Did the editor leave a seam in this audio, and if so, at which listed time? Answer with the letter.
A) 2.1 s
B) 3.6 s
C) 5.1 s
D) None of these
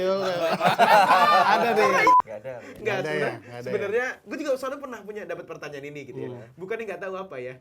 A